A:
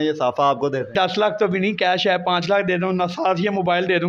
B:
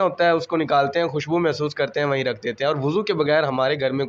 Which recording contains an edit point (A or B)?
A